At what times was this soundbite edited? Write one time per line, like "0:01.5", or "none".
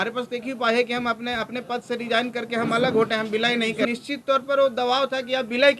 0:03.9